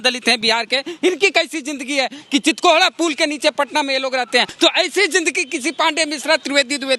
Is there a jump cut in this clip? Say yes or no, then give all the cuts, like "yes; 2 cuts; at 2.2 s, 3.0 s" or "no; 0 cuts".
yes; 1 cut; at 4.5 s